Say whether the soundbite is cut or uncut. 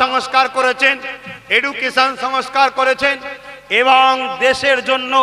uncut